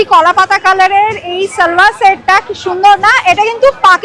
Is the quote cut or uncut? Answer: uncut